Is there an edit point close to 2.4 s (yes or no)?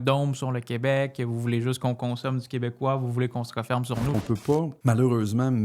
no